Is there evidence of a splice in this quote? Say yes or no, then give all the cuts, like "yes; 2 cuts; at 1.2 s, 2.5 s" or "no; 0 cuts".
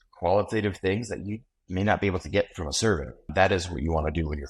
yes; 1 cut; at 3.3 s